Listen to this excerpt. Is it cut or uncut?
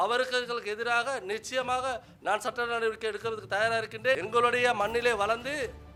cut